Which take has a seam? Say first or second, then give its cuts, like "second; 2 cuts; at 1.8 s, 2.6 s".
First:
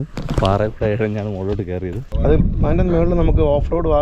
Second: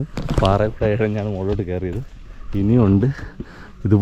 first; 1 cut; at 2.1 s